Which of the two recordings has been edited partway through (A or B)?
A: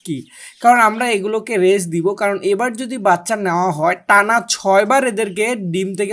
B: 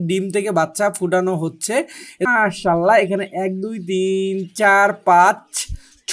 B